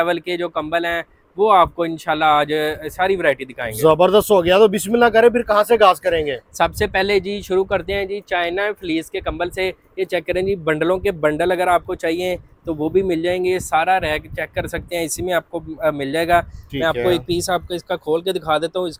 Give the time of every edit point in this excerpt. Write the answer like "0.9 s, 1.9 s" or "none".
none